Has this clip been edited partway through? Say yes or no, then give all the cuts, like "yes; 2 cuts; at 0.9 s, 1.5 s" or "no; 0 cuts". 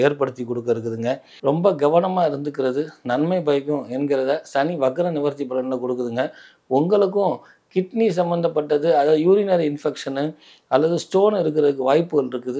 yes; 1 cut; at 1.3 s